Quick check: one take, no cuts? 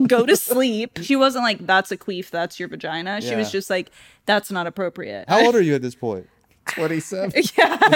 no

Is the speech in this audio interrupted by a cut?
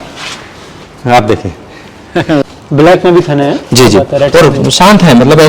yes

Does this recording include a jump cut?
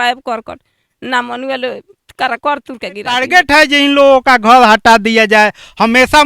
yes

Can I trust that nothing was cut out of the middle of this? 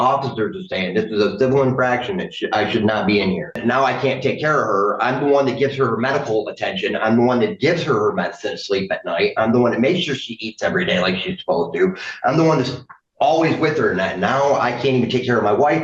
no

